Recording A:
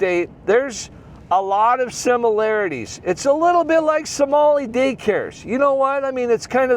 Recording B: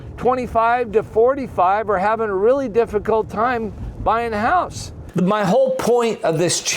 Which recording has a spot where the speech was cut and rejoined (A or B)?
B